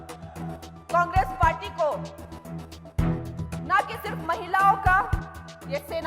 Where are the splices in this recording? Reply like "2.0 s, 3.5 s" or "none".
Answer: none